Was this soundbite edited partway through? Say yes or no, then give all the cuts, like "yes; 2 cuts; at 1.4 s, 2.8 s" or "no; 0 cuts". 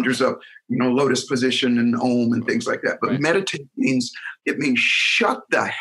yes; 1 cut; at 4.3 s